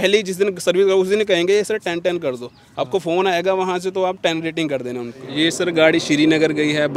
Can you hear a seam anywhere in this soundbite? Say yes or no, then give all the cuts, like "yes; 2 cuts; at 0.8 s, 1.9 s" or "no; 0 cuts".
yes; 1 cut; at 5.2 s